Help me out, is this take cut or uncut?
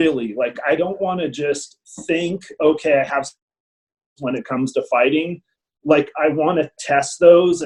uncut